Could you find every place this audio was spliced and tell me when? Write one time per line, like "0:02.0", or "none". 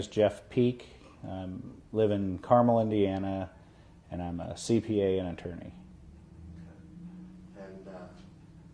0:07.0